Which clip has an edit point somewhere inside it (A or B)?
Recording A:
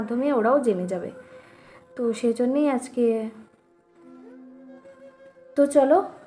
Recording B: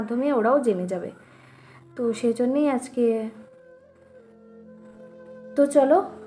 A